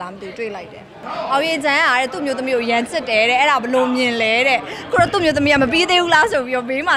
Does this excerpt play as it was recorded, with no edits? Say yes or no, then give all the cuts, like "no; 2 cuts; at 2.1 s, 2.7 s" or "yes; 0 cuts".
no; 1 cut; at 1.1 s